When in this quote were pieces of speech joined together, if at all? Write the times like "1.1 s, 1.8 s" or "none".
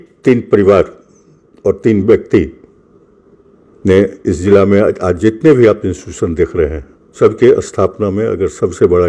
7.1 s